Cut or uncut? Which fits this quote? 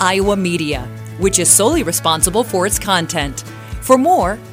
uncut